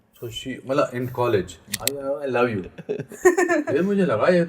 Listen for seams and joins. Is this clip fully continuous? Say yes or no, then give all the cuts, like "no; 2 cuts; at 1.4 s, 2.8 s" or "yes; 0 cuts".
no; 1 cut; at 1.8 s